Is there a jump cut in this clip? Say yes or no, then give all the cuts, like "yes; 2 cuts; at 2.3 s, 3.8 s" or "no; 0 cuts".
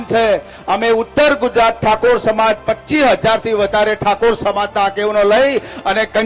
no; 0 cuts